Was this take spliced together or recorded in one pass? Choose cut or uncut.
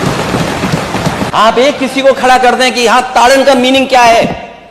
cut